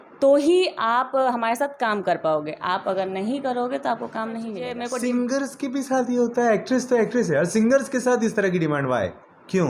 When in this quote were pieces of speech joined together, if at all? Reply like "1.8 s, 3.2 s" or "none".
4.7 s